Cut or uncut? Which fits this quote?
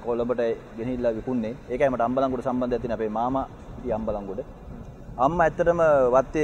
uncut